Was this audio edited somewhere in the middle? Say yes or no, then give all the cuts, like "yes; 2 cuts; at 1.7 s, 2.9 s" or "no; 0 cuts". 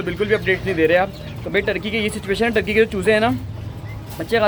no; 0 cuts